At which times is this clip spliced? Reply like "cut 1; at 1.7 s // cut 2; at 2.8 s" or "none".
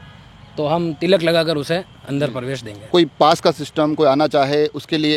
cut 1; at 2.9 s